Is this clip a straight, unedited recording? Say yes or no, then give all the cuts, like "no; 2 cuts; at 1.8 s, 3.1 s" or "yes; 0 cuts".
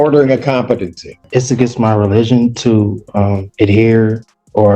no; 1 cut; at 1.2 s